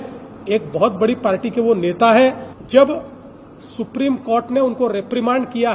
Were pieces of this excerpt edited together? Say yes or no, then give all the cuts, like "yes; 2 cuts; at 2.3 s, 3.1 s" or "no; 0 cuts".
yes; 1 cut; at 2.5 s